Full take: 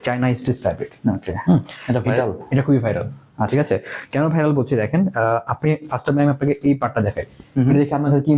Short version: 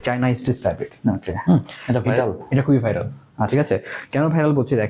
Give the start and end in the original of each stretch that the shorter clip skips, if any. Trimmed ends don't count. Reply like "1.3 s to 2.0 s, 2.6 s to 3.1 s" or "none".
none